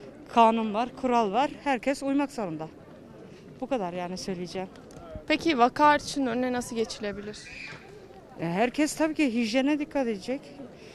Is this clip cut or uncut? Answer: uncut